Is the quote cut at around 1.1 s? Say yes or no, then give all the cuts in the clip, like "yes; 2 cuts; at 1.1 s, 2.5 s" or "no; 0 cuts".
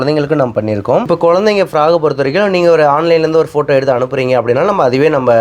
yes; 1 cut; at 1.1 s